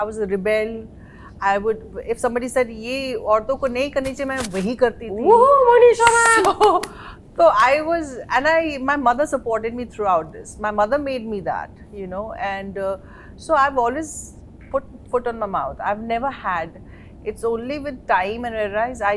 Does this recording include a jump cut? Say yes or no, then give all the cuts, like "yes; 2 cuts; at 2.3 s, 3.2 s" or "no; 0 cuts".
no; 0 cuts